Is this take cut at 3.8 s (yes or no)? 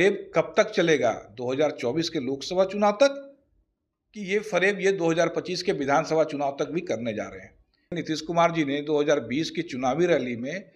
no